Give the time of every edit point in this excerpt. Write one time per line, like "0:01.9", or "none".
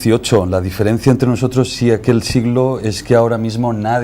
0:02.6